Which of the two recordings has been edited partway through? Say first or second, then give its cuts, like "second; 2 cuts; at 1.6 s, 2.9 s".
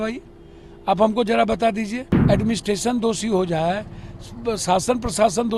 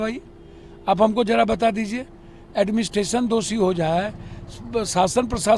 first; 1 cut; at 2.1 s